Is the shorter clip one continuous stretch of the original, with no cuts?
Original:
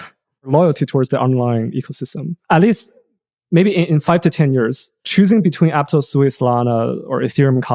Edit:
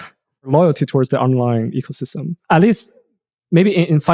yes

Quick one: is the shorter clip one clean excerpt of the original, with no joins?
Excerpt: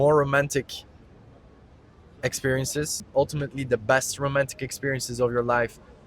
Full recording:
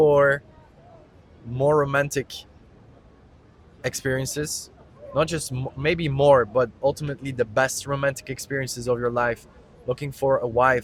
no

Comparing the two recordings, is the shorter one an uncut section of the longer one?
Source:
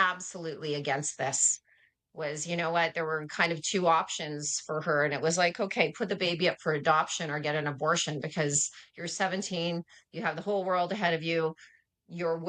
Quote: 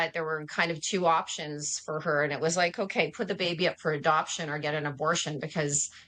yes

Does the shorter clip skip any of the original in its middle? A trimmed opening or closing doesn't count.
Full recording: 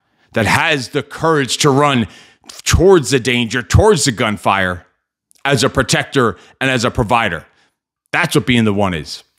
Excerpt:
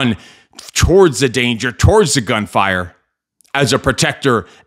no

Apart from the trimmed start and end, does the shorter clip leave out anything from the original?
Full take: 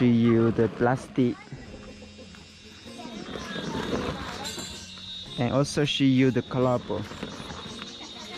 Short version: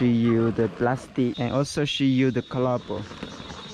yes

